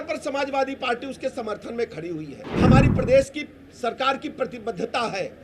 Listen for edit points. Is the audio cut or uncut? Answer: cut